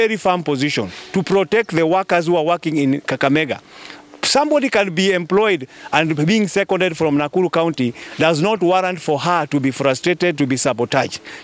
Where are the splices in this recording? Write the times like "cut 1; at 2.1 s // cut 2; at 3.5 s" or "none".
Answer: none

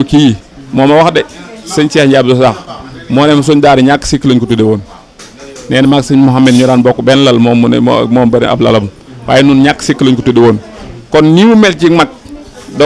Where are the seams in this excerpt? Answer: none

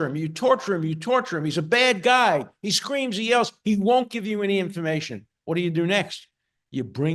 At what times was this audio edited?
none

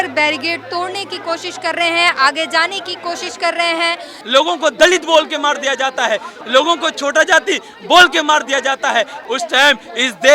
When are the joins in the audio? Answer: cut 1; at 4.2 s // cut 2; at 6.3 s // cut 3; at 9.2 s

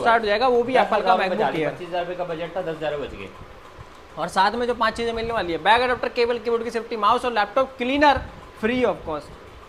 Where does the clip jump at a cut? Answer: none

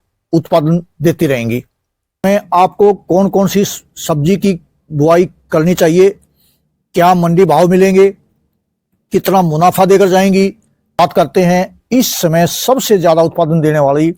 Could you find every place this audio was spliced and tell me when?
cut 1; at 2.2 s // cut 2; at 11.0 s

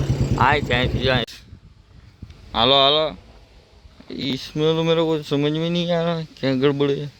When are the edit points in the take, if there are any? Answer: cut 1; at 1.3 s

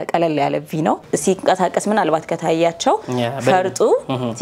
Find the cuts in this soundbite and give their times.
cut 1; at 1.1 s

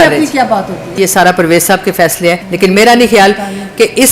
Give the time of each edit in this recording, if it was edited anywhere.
cut 1; at 1.0 s // cut 2; at 2.5 s

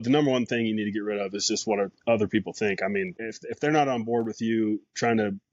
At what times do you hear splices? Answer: cut 1; at 3.3 s

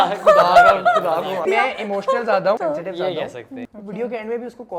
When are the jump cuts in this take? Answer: cut 1; at 1.4 s // cut 2; at 2.6 s // cut 3; at 3.6 s

